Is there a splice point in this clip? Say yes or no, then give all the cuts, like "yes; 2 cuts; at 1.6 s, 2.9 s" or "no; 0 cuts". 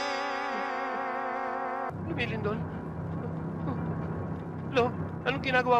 yes; 1 cut; at 1.9 s